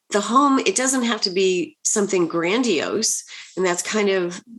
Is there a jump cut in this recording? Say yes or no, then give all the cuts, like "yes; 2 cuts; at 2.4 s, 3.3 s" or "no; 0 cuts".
no; 0 cuts